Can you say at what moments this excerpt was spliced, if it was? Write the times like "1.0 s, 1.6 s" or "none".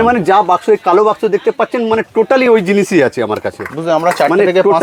none